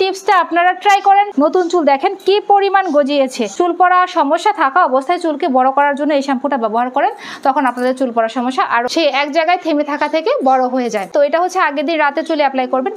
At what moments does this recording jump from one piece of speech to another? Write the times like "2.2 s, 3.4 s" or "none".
1.3 s, 3.4 s, 8.9 s, 11.1 s

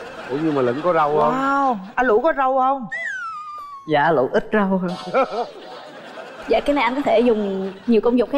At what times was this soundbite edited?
none

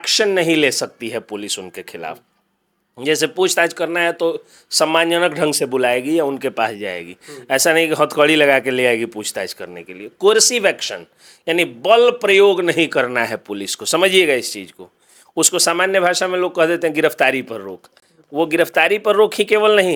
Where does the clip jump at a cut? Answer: none

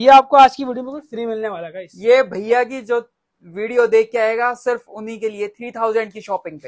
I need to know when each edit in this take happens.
none

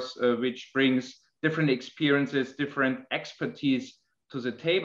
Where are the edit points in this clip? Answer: none

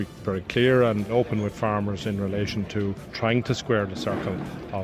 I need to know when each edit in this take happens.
1.1 s, 3.1 s

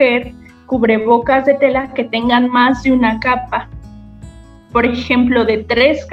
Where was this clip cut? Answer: none

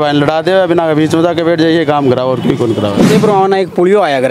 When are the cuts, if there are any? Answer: 3.0 s

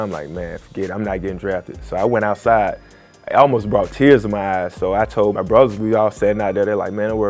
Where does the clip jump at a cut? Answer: 5.4 s

